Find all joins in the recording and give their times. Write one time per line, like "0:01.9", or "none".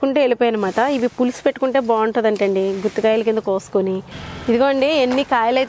0:04.2